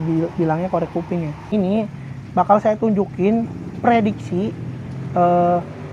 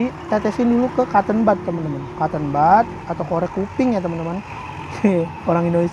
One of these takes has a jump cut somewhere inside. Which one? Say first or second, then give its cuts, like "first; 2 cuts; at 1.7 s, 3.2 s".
first; 1 cut; at 1.4 s